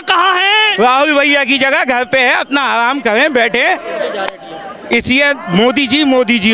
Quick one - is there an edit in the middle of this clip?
no; 0 cuts

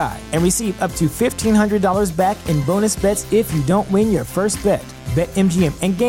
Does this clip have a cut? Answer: no; 0 cuts

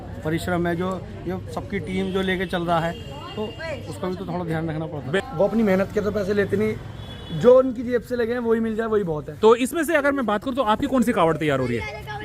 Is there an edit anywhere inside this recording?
yes; 2 cuts; at 5.1 s, 9.3 s

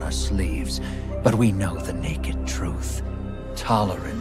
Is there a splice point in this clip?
no; 0 cuts

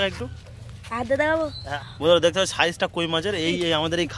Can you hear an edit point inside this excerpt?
yes; 1 cut; at 1.6 s

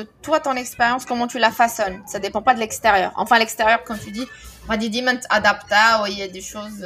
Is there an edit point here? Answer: no; 0 cuts

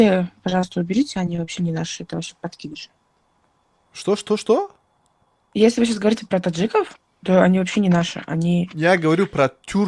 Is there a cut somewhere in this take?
no; 0 cuts

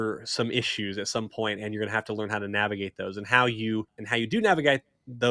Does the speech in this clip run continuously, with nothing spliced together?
no; 1 cut; at 4.0 s

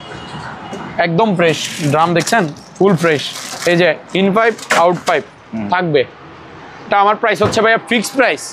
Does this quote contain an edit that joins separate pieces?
no; 0 cuts

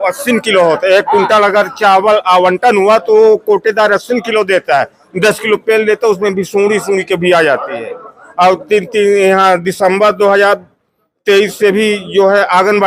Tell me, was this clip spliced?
no; 0 cuts

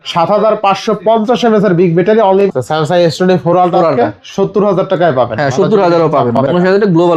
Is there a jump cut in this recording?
yes; 2 cuts; at 2.5 s, 6.4 s

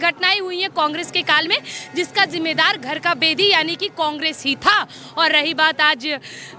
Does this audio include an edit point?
no; 0 cuts

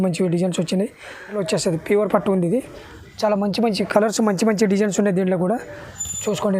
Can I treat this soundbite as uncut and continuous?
no; 1 cut; at 1.4 s

